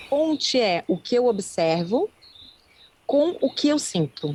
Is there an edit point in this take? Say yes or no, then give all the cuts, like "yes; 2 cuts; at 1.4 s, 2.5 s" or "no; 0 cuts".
no; 0 cuts